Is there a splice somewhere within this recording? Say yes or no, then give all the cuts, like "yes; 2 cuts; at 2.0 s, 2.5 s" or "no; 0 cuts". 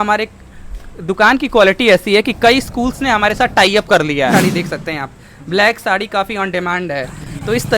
yes; 1 cut; at 4.3 s